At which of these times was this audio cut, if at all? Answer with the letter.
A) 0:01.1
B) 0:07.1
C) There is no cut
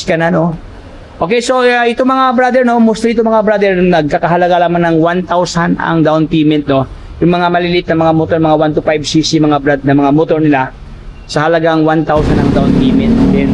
C